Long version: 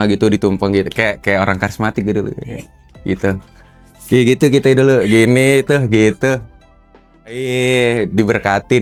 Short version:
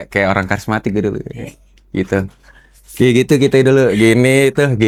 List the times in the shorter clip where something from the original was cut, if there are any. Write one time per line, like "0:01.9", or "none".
none